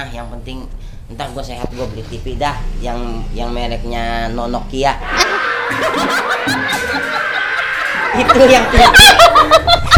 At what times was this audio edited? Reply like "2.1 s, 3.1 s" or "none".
none